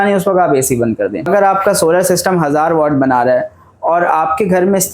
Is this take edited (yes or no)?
yes